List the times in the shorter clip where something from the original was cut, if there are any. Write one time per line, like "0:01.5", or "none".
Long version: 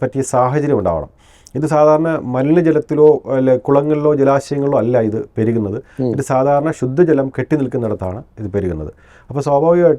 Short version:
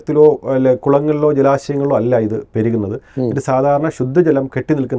none